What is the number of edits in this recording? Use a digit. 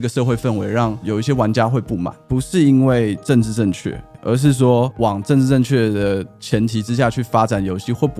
2